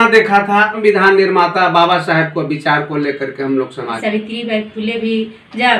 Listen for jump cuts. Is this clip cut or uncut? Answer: cut